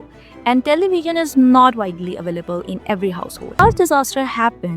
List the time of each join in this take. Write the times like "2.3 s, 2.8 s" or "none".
3.5 s